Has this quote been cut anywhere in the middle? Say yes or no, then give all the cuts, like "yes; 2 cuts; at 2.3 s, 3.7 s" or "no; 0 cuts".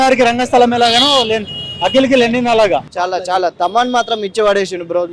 yes; 1 cut; at 2.9 s